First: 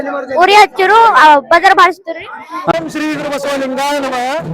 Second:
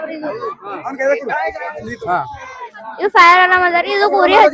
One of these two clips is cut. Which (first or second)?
first